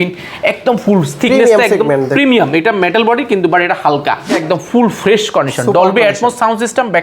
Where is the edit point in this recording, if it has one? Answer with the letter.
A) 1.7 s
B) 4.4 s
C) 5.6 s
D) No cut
B